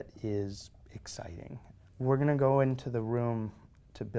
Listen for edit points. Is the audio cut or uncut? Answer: cut